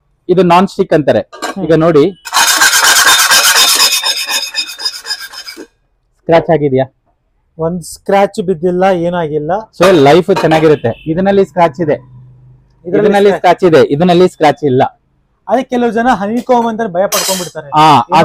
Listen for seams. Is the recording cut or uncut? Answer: uncut